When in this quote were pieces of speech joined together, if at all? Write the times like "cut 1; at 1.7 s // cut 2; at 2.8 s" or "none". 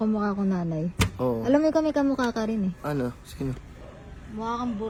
none